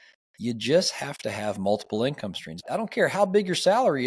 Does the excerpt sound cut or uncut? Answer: cut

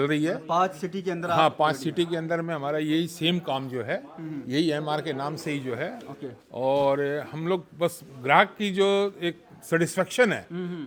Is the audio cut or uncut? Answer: uncut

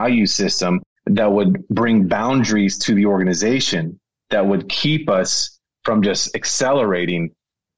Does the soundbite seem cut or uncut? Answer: uncut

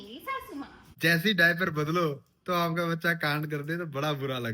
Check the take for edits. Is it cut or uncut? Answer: cut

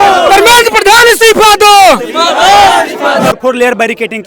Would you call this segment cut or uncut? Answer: cut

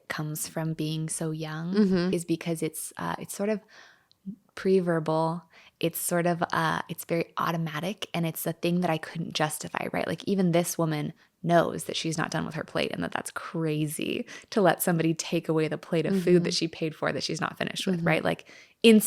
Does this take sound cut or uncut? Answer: uncut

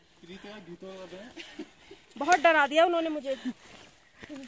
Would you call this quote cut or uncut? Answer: uncut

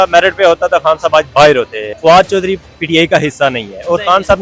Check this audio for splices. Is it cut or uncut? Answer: cut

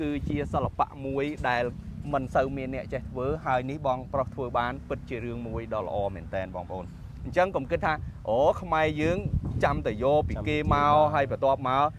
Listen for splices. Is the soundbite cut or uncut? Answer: uncut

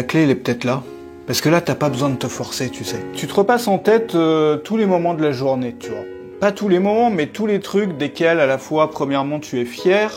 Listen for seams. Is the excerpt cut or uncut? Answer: cut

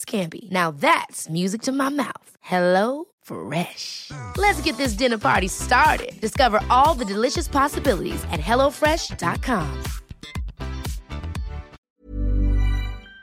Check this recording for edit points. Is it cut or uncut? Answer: uncut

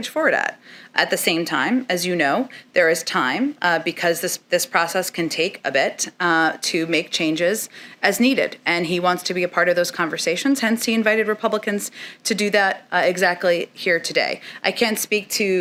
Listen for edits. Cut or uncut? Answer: uncut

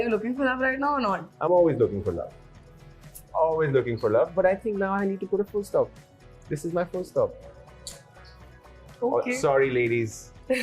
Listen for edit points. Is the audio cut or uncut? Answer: uncut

